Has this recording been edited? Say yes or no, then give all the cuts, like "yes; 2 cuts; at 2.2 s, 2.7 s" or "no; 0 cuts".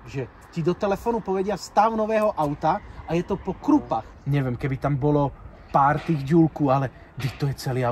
yes; 1 cut; at 4.1 s